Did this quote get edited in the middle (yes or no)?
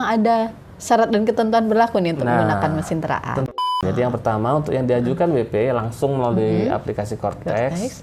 yes